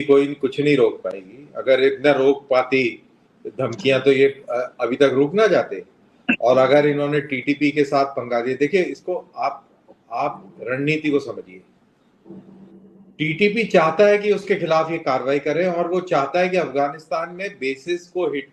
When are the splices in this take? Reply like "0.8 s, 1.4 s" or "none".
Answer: none